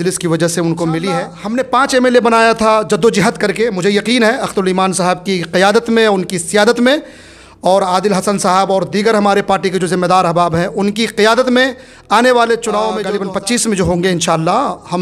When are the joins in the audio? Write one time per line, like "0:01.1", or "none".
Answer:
0:01.4
0:13.1